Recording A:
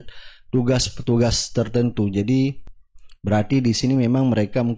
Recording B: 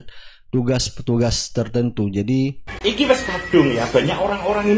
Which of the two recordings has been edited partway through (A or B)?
B